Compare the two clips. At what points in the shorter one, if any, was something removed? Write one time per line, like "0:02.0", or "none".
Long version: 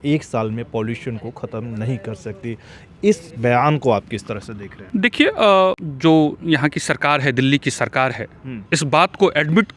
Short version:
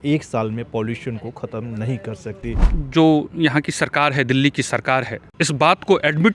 0:02.8
0:05.2